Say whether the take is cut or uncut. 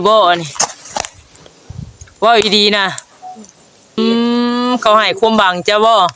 cut